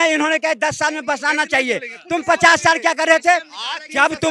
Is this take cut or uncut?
uncut